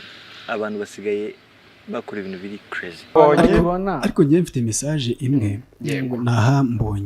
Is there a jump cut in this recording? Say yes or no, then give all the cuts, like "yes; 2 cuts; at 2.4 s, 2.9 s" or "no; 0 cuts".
yes; 1 cut; at 3.1 s